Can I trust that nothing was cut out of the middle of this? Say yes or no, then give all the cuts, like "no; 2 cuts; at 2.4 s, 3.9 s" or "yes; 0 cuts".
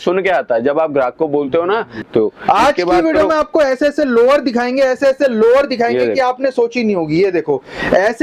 no; 1 cut; at 2.0 s